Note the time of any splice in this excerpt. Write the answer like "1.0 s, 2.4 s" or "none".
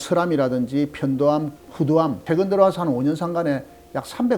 2.2 s

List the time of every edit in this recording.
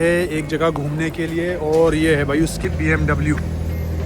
2.6 s

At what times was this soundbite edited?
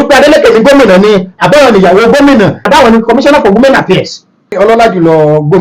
2.6 s, 4.5 s

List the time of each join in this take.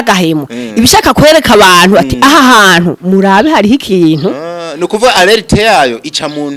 none

